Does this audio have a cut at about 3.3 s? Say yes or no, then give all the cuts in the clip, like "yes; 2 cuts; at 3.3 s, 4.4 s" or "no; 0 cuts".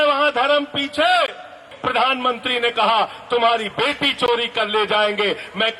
no; 1 cut; at 1.7 s